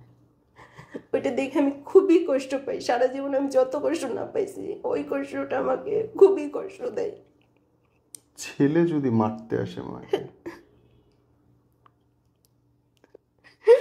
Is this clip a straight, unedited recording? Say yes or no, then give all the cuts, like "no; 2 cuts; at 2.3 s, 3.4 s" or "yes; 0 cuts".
yes; 0 cuts